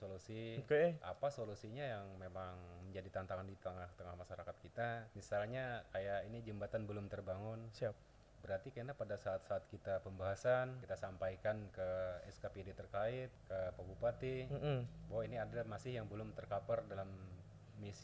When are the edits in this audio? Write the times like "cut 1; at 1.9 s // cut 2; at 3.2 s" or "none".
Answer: cut 1; at 5.1 s // cut 2; at 10.8 s // cut 3; at 13.4 s